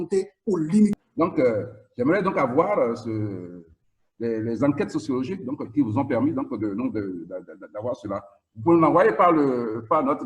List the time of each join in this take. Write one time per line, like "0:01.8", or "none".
0:00.9